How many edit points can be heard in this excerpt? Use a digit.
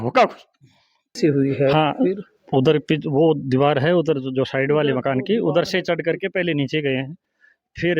1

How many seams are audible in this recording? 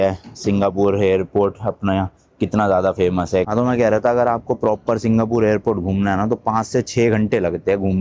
1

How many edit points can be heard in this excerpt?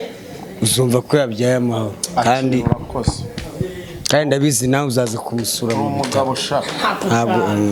0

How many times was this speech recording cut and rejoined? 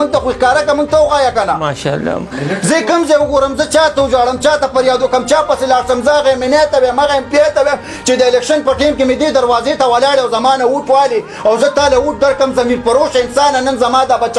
0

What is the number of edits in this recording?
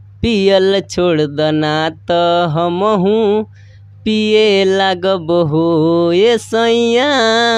0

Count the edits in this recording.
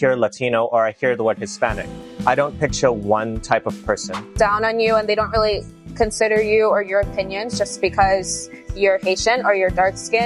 1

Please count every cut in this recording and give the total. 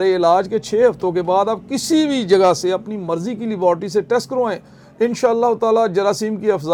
0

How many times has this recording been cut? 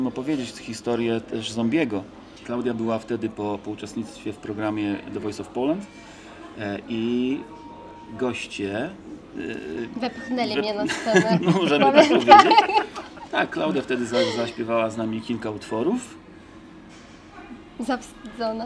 1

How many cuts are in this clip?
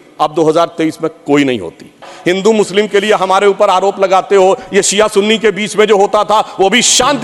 1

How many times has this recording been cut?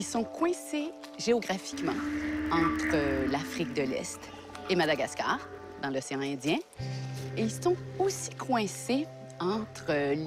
1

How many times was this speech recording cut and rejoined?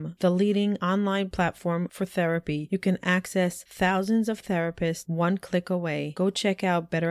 0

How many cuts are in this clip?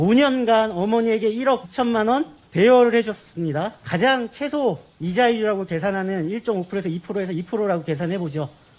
1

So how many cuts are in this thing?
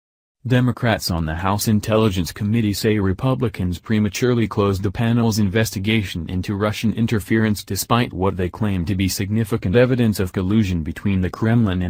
1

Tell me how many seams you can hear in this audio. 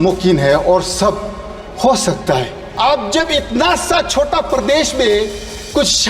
1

